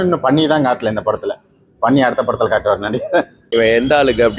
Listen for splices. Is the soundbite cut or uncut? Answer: cut